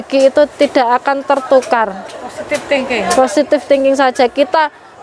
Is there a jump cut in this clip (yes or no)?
no